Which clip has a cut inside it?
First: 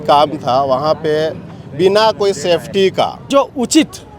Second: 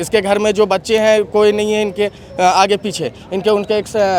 first; 1 cut; at 3.3 s

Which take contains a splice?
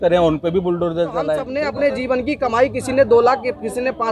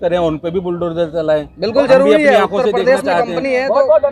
first; 1 cut; at 1.4 s

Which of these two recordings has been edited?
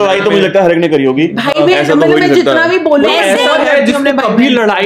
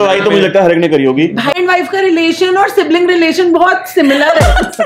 second; 1 cut; at 1.5 s

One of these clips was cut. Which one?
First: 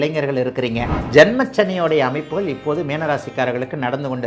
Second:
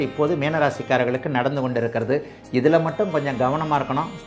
first; 1 cut; at 1.0 s

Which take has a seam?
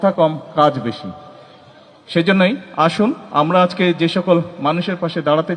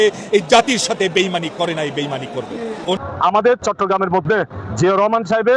second; 1 cut; at 3.0 s

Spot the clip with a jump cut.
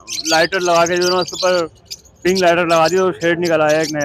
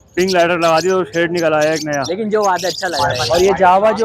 second; 1 cut; at 3.1 s

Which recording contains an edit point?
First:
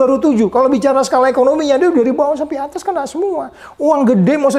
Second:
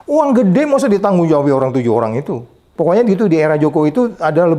second; 1 cut; at 2.6 s

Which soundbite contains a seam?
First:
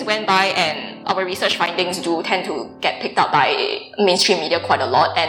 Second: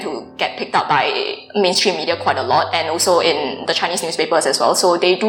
first; 1 cut; at 1.0 s

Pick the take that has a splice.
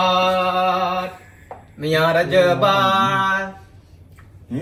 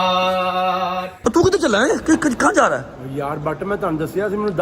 second; 1 cut; at 1.1 s

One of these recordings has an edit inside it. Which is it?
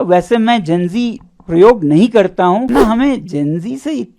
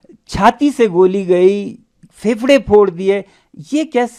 first; 1 cut; at 2.7 s

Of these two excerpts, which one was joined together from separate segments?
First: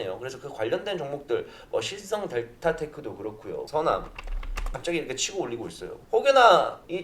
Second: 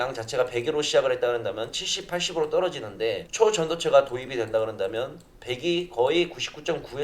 first; 1 cut; at 3.7 s

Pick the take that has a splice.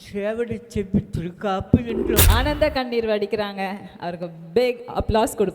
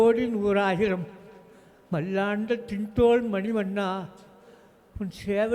first; 1 cut; at 2.2 s

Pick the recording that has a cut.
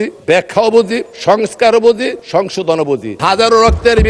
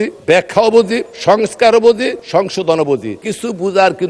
first; 1 cut; at 3.2 s

